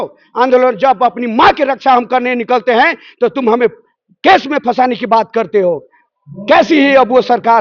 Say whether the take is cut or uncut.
uncut